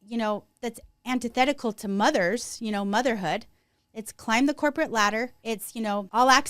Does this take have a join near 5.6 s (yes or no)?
yes